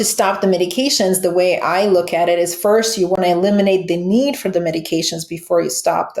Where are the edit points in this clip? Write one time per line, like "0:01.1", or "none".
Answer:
none